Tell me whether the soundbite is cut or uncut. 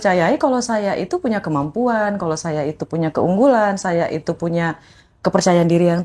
uncut